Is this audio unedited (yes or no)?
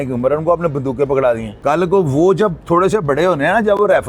no